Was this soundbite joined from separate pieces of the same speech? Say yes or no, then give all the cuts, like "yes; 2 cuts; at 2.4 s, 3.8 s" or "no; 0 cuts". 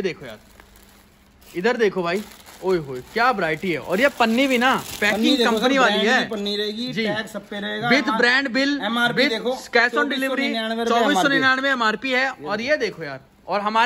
no; 0 cuts